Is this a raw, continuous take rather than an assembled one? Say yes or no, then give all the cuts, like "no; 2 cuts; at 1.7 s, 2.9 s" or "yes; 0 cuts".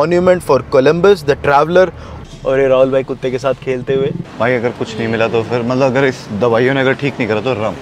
no; 2 cuts; at 2.1 s, 4.2 s